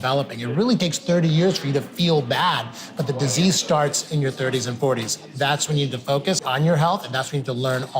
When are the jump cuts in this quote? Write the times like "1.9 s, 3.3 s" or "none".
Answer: 5.2 s, 6.4 s